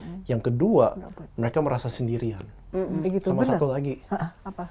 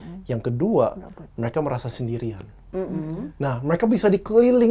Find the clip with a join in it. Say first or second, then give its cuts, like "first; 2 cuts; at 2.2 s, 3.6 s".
first; 1 cut; at 3.1 s